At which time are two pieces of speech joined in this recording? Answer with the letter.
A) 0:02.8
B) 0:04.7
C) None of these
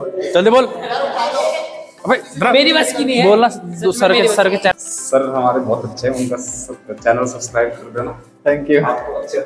B